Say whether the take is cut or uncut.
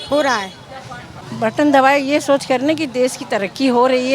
cut